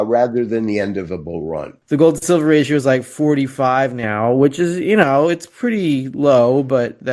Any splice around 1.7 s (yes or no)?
yes